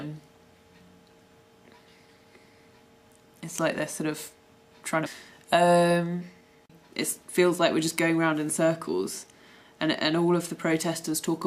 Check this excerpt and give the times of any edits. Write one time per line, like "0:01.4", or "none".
none